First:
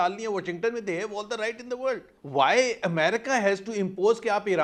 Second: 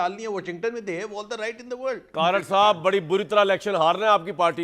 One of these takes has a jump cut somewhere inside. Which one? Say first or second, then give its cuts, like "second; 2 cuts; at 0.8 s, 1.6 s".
second; 1 cut; at 2.1 s